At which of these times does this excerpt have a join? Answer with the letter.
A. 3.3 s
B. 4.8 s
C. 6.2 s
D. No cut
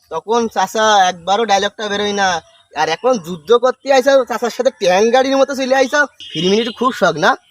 C